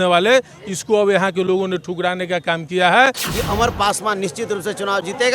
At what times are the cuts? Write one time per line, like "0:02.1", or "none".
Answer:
0:03.3